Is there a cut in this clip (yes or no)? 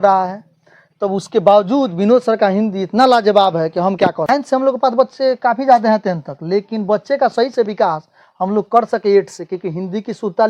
yes